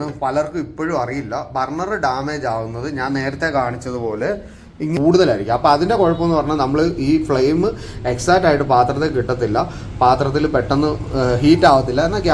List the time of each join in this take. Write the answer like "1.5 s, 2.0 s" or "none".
4.9 s